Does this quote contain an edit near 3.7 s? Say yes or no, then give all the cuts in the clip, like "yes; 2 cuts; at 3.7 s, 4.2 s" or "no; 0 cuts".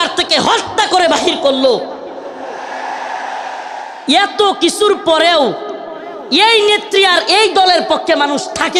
no; 0 cuts